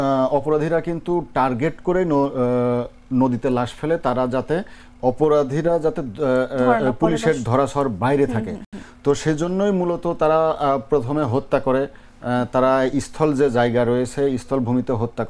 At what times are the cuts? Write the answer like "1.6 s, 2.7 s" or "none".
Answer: none